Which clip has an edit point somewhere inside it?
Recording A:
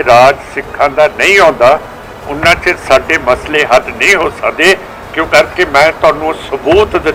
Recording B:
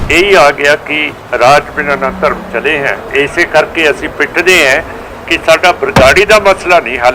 B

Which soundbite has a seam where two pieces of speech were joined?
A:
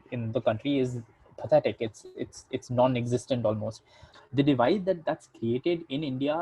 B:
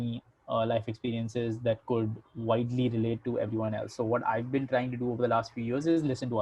A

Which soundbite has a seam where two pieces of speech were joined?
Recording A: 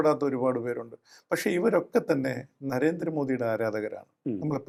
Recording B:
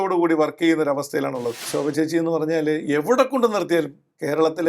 B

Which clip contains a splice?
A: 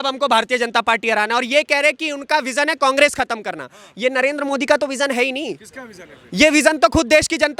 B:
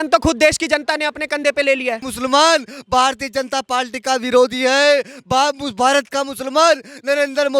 B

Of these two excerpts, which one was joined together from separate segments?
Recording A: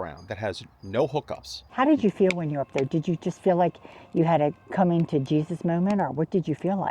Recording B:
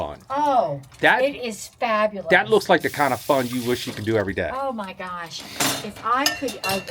A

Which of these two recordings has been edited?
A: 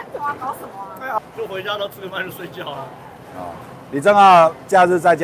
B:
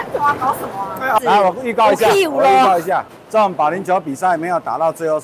B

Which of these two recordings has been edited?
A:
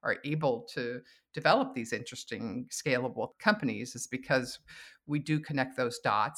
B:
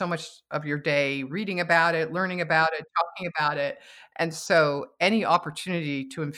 A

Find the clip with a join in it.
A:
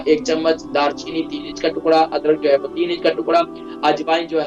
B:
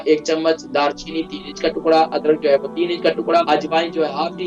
B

